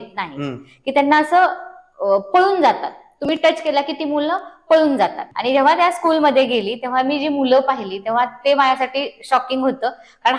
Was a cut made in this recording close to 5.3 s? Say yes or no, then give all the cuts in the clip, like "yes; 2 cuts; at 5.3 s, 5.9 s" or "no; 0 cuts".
yes; 1 cut; at 5.3 s